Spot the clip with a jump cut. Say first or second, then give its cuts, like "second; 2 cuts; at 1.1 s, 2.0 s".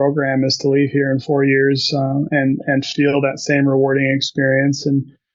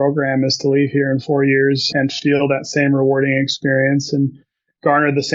second; 1 cut; at 1.9 s